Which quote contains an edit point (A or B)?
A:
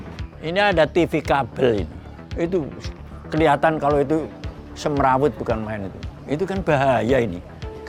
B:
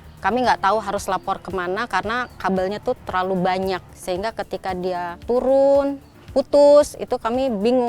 B